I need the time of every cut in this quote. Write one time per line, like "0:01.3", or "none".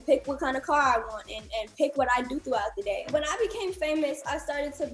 0:03.1